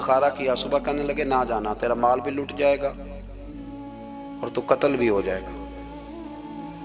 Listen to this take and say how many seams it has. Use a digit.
0